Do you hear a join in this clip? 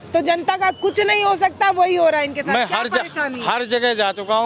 no; 0 cuts

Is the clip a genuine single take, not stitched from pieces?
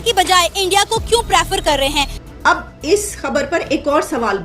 no; 1 cut; at 2.1 s

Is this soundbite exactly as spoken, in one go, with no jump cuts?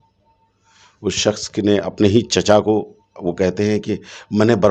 yes; 0 cuts

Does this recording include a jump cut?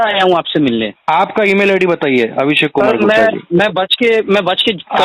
yes; 1 cut; at 1.0 s

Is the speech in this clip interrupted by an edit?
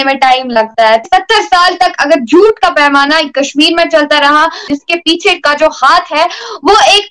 yes; 2 cuts; at 1.0 s, 4.6 s

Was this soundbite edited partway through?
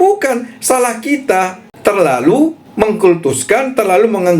yes; 2 cuts; at 1.6 s, 2.6 s

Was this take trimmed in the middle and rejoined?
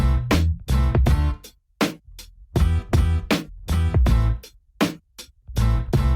no; 0 cuts

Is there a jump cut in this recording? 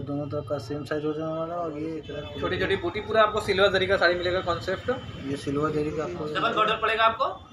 yes; 2 cuts; at 2.0 s, 6.3 s

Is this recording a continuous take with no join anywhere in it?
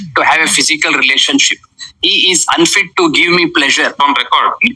yes; 0 cuts

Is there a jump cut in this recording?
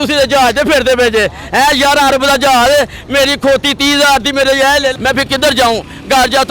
yes; 1 cut; at 5.0 s

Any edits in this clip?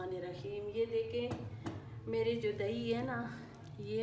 no; 0 cuts

